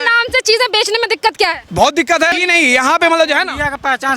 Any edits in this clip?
yes; 2 cuts; at 1.6 s, 2.3 s

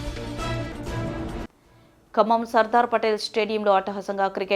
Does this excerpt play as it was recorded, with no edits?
no; 1 cut; at 1.4 s

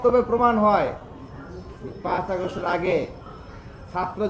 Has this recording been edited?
no; 0 cuts

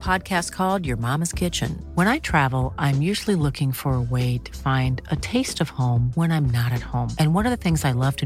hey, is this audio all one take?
yes; 0 cuts

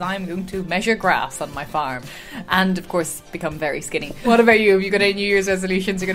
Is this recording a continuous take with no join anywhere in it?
no; 2 cuts; at 2.0 s, 4.2 s

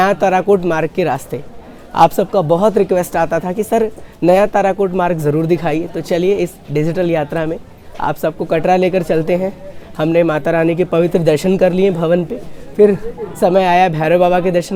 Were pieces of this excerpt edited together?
no; 0 cuts

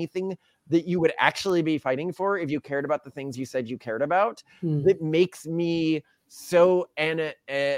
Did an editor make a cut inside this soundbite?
no; 0 cuts

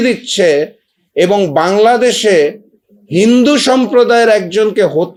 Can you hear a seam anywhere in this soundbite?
no; 0 cuts

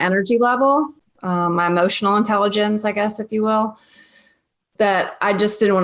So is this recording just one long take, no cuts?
no; 1 cut; at 1.0 s

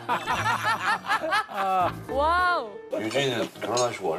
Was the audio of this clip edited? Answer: yes; 1 cut; at 2.9 s

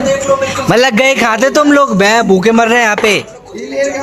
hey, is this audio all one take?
yes; 0 cuts

